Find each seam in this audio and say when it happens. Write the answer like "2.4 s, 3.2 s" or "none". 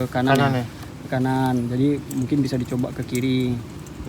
none